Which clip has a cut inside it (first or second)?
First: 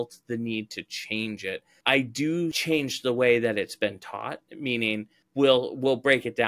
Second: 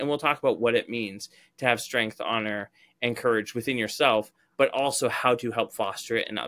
first